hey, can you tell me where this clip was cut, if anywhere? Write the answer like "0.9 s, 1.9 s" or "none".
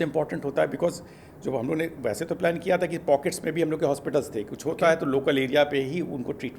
none